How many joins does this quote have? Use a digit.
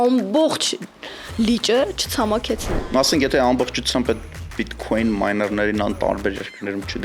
1